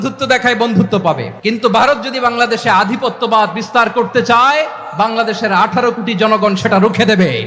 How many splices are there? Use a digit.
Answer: 1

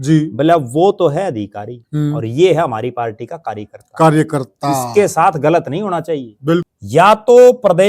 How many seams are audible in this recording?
1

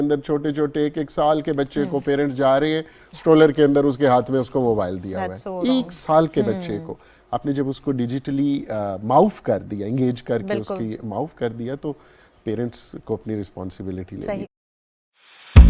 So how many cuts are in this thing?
1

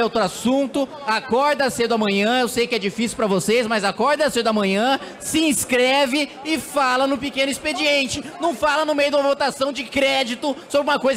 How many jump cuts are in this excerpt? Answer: 0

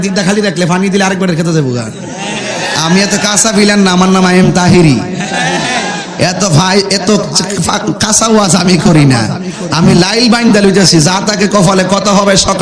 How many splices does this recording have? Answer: 0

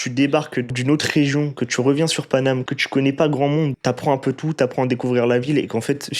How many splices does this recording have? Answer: 3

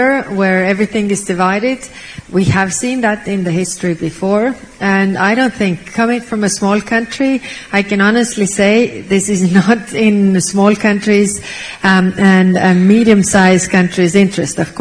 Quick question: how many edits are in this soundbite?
0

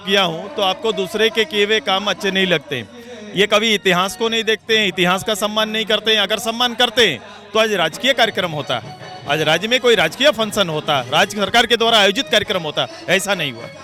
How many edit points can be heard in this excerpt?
0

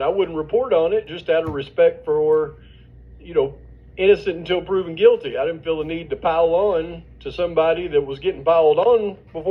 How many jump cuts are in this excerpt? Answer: 0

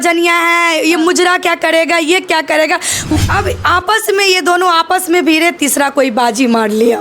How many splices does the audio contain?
1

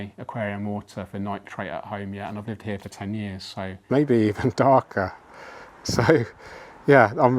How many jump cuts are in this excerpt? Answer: 1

